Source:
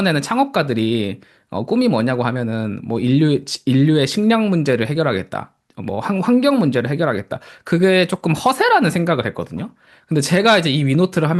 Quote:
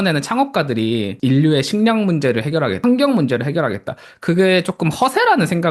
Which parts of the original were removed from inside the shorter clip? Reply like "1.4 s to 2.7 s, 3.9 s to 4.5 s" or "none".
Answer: 1.1 s to 3.6 s, 5.2 s to 6.2 s

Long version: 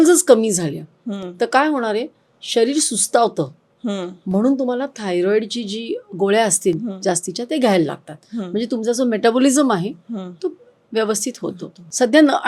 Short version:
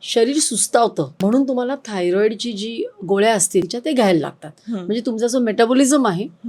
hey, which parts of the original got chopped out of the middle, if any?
3.5 s to 4.2 s, 6.8 s to 7.4 s

